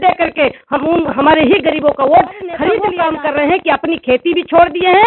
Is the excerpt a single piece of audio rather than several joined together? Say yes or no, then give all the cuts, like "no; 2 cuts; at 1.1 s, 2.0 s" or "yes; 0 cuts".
no; 1 cut; at 2.9 s